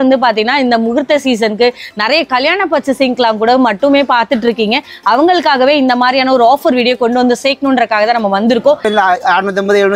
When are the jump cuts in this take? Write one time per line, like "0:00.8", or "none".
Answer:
0:08.9